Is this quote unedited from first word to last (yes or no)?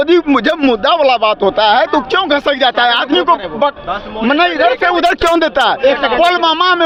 yes